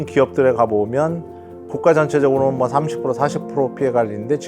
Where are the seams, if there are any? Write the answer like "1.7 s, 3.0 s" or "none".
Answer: 1.6 s